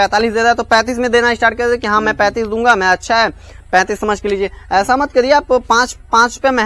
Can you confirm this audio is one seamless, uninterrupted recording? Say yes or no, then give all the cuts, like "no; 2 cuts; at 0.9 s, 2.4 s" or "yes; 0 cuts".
yes; 0 cuts